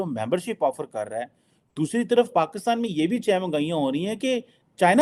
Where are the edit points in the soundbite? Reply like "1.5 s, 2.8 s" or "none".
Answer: none